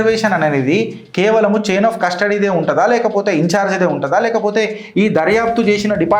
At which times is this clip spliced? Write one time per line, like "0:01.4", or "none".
none